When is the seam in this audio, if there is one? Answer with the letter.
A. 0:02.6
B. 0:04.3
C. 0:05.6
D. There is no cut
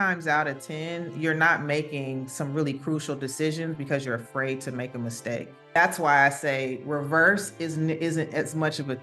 C